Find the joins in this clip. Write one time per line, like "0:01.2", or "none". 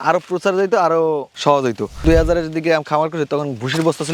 0:01.4